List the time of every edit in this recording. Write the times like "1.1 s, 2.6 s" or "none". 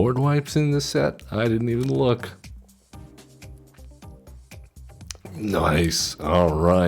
3.7 s